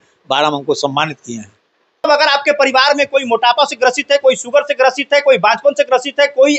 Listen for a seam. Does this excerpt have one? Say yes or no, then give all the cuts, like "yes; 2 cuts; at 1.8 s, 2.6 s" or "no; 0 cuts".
yes; 1 cut; at 2.0 s